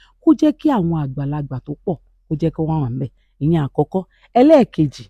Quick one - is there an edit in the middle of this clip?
no; 0 cuts

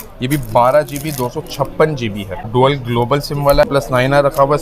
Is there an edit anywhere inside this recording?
yes; 2 cuts; at 2.3 s, 3.7 s

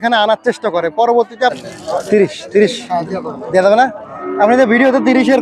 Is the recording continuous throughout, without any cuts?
no; 1 cut; at 1.5 s

